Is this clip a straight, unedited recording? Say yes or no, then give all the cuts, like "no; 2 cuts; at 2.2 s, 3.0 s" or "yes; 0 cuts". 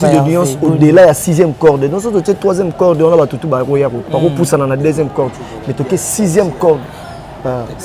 yes; 0 cuts